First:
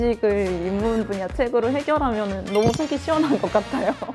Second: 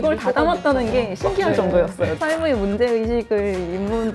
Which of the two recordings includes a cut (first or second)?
second